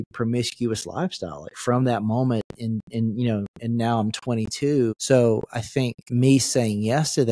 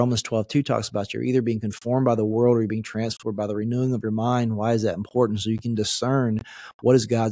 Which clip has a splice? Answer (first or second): first